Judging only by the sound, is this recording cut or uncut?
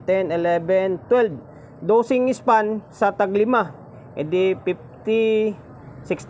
uncut